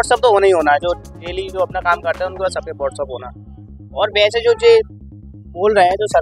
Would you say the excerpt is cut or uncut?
uncut